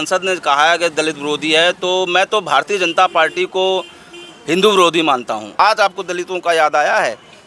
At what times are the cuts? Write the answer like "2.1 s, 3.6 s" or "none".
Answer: 5.6 s